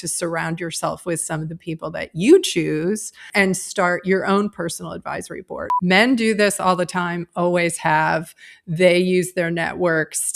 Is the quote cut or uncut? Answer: cut